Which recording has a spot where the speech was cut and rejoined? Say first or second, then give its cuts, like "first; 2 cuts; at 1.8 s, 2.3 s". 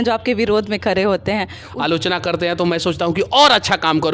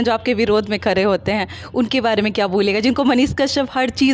first; 1 cut; at 1.6 s